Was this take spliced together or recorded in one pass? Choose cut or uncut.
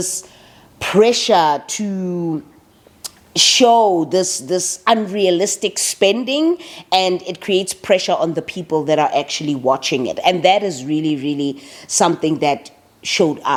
uncut